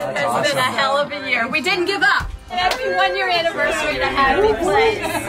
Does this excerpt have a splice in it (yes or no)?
yes